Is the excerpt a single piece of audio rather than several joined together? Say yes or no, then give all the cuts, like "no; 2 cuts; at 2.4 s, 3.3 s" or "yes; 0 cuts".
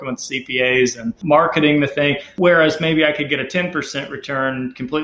no; 2 cuts; at 1.2 s, 2.3 s